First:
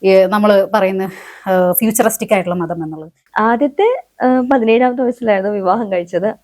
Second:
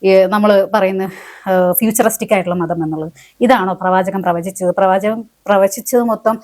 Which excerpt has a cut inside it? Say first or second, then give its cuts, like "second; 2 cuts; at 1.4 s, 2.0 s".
first; 1 cut; at 3.2 s